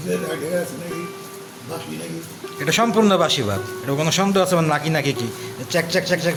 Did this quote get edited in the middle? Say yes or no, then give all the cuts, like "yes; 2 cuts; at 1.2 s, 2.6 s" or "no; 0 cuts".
no; 0 cuts